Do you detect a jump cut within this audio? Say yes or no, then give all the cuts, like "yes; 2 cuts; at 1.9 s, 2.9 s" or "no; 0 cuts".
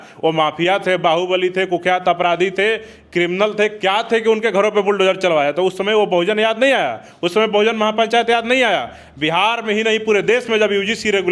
no; 0 cuts